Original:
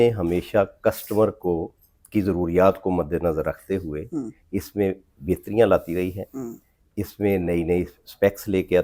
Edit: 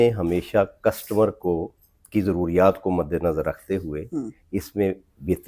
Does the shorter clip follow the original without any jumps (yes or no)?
yes